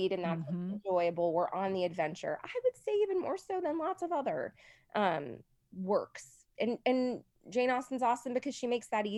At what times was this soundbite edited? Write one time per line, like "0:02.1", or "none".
none